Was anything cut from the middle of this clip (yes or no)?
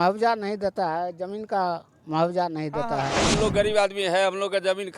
yes